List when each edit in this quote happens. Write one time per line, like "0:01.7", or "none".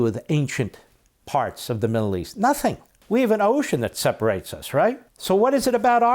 0:02.9
0:05.1